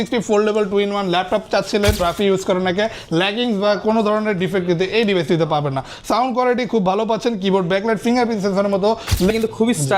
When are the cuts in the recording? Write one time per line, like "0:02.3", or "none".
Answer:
0:02.0
0:09.3